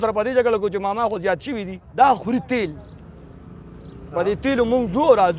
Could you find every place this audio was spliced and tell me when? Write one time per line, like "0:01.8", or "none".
0:01.8

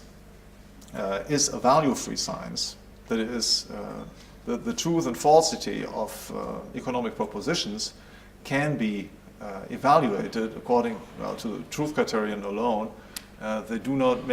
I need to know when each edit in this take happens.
0:04.7

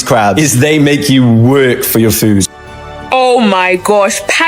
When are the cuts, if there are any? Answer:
0:02.9

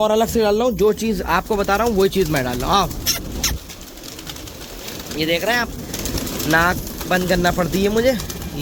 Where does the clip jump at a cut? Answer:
none

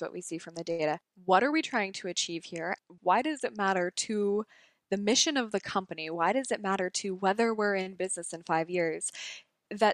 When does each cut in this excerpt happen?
0:01.1
0:02.8

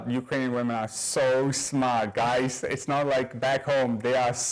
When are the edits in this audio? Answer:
none

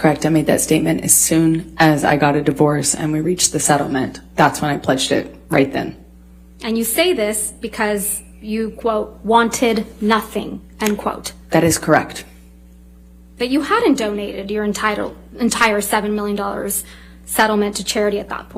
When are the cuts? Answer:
none

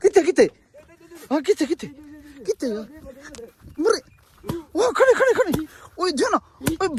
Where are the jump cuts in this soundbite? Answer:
none

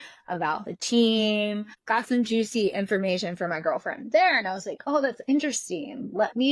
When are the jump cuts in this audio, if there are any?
0:01.7

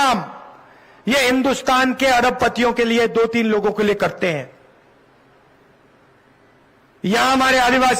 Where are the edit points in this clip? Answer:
none

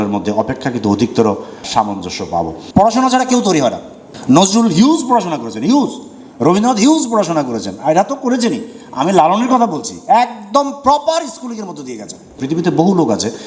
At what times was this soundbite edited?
0:02.6
0:12.3

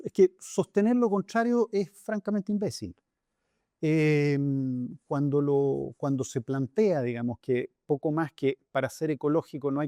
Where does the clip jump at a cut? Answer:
none

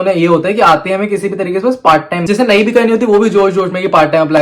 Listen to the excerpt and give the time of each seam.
0:02.2

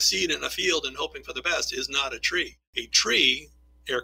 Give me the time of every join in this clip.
0:02.3

